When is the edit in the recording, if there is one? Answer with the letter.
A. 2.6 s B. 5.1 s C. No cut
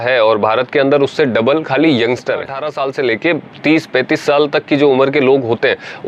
A